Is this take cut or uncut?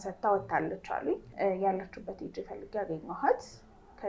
cut